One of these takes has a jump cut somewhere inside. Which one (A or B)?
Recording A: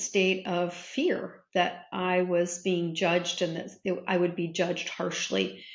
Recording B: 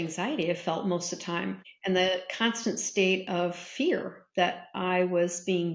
B